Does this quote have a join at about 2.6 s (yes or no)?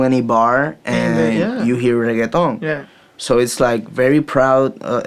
no